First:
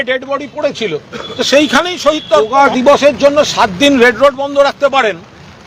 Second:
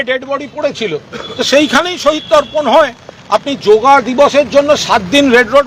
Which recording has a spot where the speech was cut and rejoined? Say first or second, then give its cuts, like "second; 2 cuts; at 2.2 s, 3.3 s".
first; 1 cut; at 2.5 s